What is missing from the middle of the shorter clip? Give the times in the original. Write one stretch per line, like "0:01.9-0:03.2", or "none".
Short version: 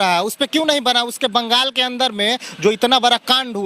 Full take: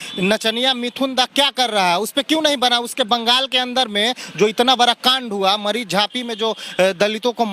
none